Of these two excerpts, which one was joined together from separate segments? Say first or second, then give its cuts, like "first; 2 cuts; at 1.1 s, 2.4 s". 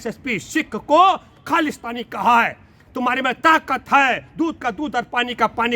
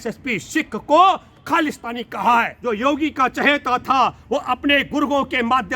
second; 1 cut; at 2.6 s